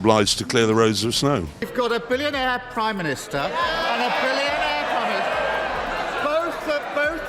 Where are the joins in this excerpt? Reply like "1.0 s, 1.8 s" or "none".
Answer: 1.6 s